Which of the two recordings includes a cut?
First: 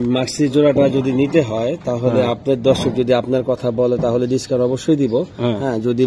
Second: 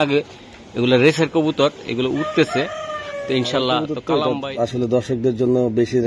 second; 1 cut; at 4.0 s

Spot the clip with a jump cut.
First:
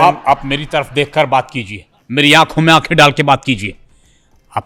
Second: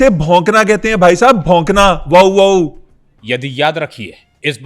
second; 1 cut; at 3.1 s

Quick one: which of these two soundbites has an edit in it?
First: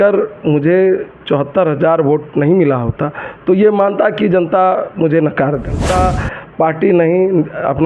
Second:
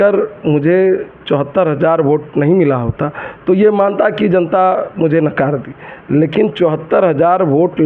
first; 1 cut; at 5.8 s

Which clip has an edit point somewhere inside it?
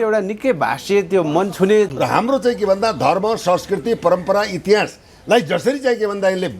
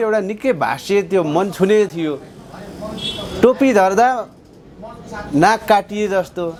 first; 1 cut; at 1.9 s

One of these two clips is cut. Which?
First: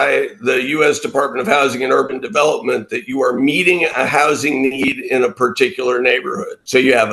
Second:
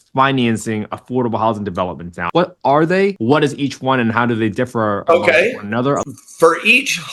second; 3 cuts; at 2.3 s, 3.1 s, 6.0 s

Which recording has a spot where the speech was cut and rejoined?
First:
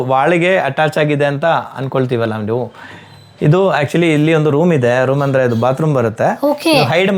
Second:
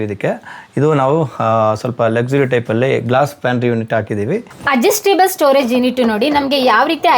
second; 1 cut; at 4.6 s

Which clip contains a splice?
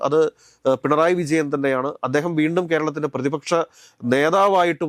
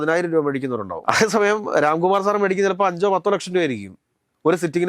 second; 1 cut; at 0.9 s

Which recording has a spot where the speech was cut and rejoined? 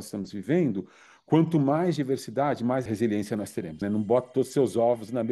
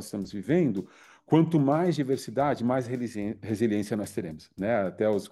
first; 2 cuts; at 2.9 s, 3.8 s

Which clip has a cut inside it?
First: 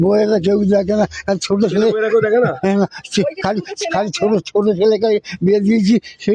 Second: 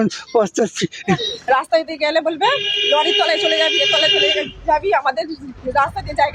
second; 1 cut; at 1.3 s

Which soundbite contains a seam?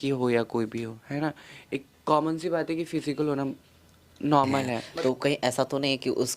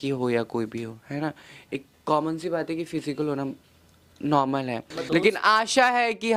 first; 1 cut; at 5.0 s

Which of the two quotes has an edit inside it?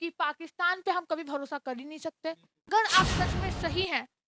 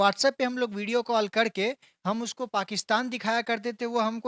first; 1 cut; at 2.5 s

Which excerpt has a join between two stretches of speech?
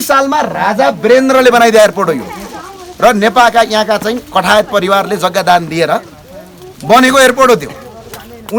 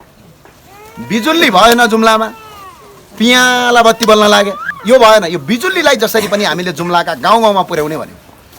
second; 1 cut; at 4.7 s

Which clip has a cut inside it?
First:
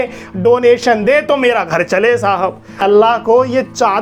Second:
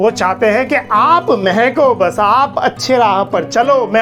first; 1 cut; at 2.8 s

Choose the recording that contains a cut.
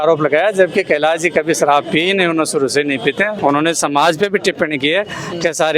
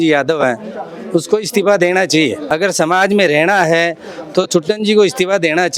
first; 1 cut; at 3.3 s

